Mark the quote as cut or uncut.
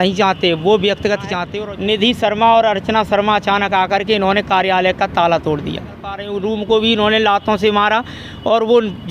cut